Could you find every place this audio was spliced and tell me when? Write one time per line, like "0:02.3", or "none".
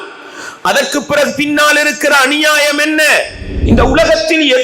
0:03.5